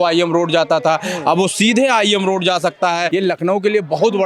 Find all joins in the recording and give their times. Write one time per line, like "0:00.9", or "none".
0:03.1